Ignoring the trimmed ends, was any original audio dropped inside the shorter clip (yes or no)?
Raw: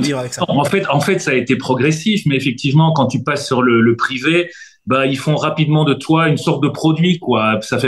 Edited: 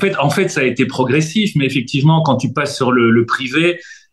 no